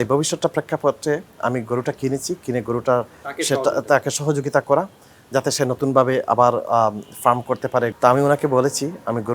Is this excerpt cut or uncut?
cut